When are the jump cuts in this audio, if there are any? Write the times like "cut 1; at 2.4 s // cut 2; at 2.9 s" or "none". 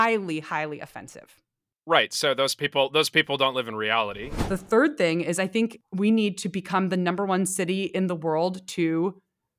cut 1; at 4.3 s // cut 2; at 5.8 s